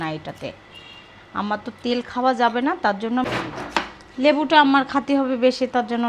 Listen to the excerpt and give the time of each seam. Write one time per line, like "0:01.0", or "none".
0:03.2